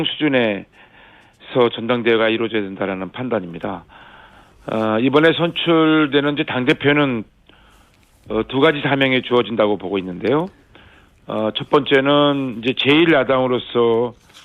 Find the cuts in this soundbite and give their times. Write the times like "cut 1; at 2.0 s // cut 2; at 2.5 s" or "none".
none